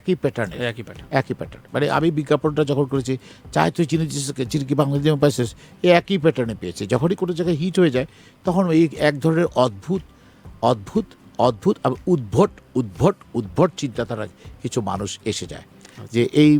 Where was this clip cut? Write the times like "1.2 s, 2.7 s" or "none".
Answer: none